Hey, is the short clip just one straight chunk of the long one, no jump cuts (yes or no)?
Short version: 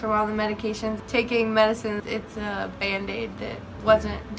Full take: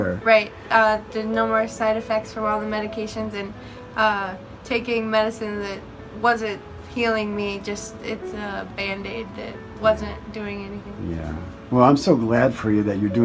no